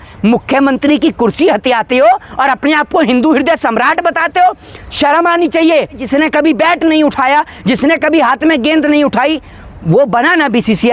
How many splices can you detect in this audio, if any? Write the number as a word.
one